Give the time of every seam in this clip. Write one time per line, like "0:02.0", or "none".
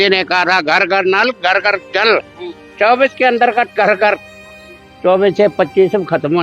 none